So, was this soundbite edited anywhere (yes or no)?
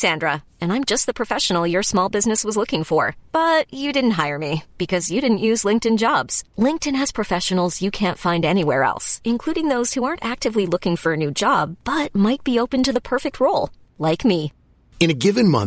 no